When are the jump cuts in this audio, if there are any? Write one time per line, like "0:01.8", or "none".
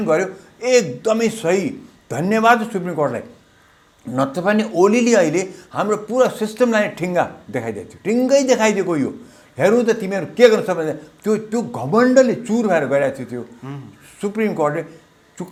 none